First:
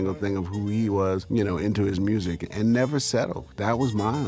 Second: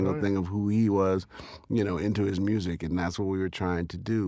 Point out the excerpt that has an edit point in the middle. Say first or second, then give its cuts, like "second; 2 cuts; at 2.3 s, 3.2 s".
first; 3 cuts; at 1.2 s, 2.4 s, 3.4 s